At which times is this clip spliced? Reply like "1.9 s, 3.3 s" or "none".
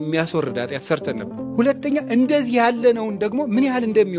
1.5 s